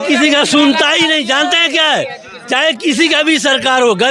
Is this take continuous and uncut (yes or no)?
yes